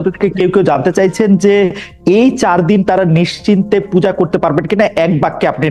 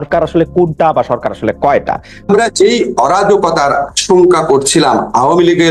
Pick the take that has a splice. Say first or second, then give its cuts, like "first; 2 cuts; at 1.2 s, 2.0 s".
second; 1 cut; at 2.3 s